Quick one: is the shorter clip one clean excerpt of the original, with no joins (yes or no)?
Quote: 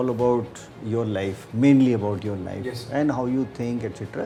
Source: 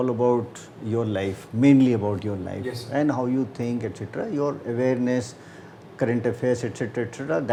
yes